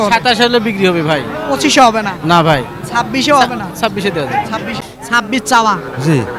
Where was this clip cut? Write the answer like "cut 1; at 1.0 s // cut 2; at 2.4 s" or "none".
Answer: cut 1; at 4.9 s